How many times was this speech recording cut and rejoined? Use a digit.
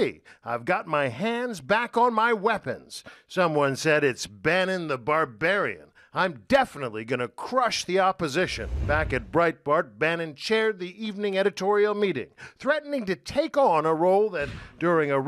0